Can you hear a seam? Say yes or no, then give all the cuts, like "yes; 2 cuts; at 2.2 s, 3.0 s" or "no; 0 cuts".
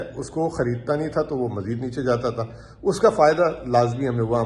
no; 0 cuts